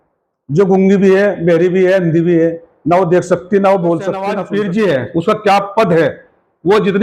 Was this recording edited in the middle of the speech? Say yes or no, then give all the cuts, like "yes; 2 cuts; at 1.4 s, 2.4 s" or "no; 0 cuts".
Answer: yes; 1 cut; at 4.3 s